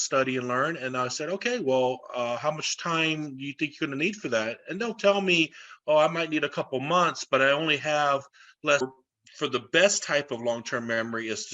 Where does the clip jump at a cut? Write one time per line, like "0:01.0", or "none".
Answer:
0:08.8